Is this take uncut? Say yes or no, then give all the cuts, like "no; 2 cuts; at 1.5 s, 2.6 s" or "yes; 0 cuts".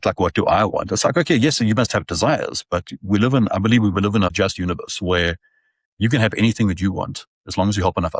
no; 1 cut; at 4.3 s